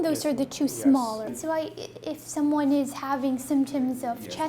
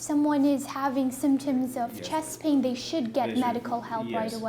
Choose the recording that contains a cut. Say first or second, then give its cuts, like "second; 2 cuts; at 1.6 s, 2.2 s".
first; 1 cut; at 1.3 s